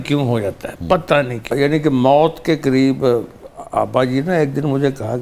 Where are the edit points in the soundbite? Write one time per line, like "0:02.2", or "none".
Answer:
0:01.4